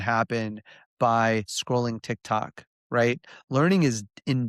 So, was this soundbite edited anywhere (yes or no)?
yes